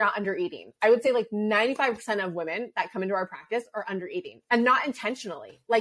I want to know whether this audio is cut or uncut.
uncut